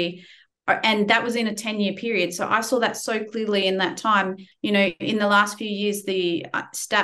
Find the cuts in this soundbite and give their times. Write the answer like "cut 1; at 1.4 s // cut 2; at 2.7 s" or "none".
cut 1; at 4.4 s